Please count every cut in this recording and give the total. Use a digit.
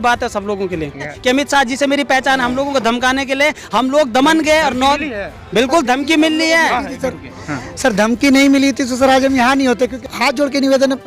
2